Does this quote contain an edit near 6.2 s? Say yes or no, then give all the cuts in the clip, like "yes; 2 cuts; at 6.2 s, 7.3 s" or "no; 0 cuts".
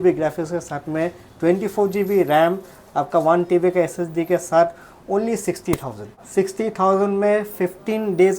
yes; 1 cut; at 6.2 s